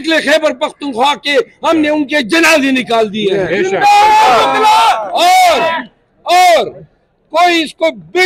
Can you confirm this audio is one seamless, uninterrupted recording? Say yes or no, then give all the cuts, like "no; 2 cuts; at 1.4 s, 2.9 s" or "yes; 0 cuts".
yes; 0 cuts